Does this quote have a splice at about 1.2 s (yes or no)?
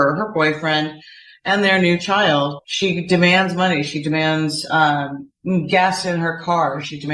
no